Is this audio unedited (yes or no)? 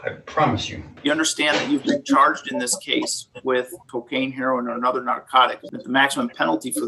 no